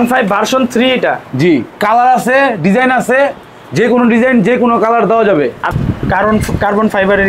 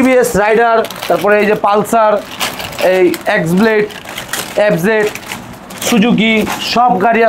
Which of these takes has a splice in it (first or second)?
first